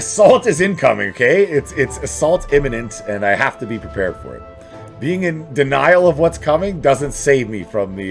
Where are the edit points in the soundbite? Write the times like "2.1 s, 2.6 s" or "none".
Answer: none